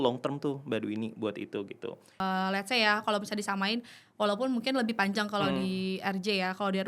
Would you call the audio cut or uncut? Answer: cut